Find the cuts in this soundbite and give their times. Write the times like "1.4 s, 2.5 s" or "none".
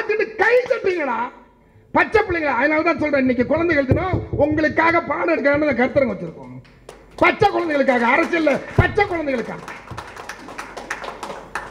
none